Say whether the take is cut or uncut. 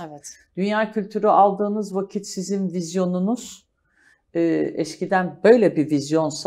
uncut